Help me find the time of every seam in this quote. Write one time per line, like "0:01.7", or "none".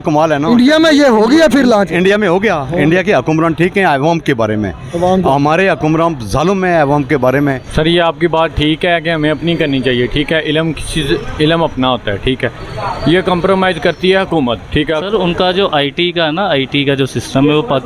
0:07.6
0:15.0